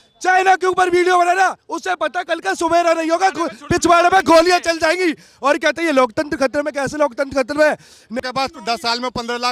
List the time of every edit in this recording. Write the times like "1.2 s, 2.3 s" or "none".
8.2 s